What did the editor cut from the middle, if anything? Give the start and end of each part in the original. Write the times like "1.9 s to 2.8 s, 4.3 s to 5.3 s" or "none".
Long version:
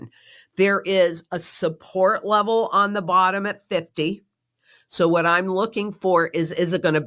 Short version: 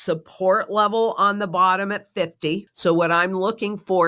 4.2 s to 4.8 s